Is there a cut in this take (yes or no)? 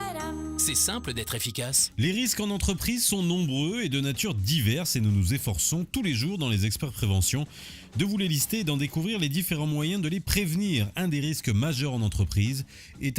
yes